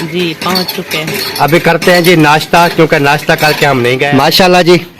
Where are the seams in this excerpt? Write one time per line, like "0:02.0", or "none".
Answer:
0:04.1